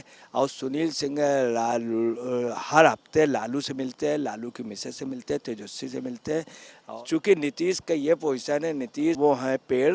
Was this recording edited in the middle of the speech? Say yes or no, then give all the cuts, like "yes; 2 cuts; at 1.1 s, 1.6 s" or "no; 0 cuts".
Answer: yes; 1 cut; at 6.8 s